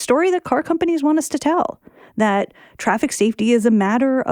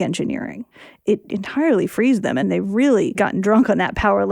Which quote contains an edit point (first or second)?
second